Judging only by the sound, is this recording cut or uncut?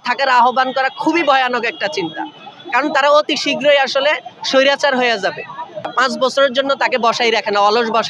cut